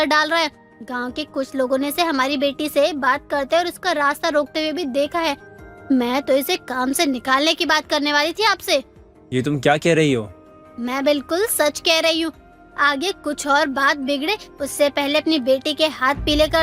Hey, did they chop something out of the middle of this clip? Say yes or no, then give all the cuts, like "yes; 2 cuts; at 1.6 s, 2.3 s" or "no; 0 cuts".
no; 0 cuts